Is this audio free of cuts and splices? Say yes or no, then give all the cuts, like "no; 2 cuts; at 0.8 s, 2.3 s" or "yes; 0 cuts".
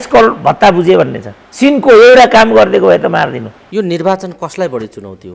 no; 1 cut; at 3.6 s